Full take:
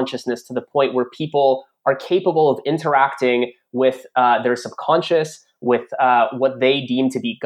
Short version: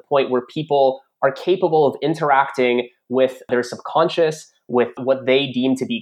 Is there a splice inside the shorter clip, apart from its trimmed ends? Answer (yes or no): yes